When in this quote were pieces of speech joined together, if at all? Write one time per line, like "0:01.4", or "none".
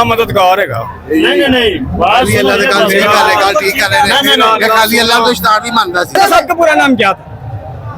0:06.0